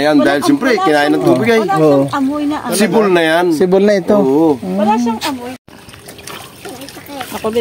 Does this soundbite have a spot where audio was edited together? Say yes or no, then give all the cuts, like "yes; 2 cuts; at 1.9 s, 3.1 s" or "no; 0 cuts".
yes; 1 cut; at 5.5 s